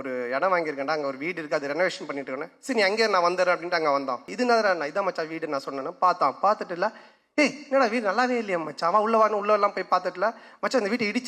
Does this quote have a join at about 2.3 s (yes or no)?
no